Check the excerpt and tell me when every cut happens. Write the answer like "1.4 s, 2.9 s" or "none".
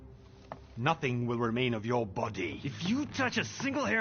2.6 s